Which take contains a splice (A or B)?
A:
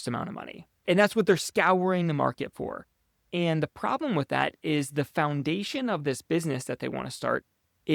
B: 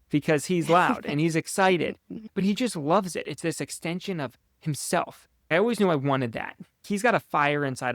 B